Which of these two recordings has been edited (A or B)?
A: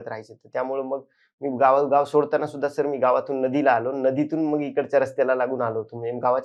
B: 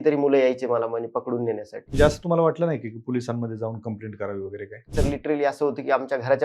B